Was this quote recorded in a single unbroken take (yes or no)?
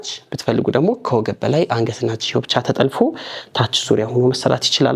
yes